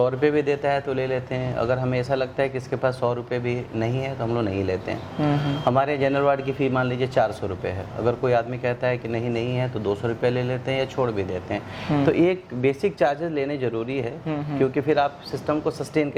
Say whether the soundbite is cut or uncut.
uncut